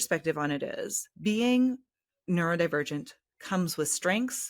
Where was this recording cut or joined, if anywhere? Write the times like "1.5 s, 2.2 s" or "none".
1.0 s